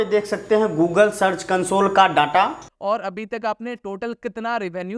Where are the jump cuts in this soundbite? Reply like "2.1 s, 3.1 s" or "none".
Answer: 2.7 s